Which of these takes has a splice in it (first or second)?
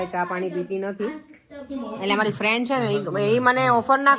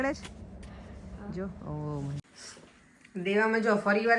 second